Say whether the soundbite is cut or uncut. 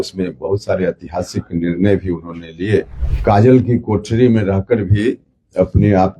cut